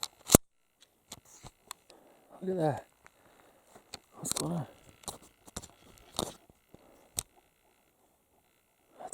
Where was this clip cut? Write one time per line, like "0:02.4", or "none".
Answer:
0:01.8